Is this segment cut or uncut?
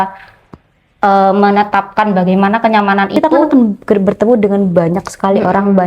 cut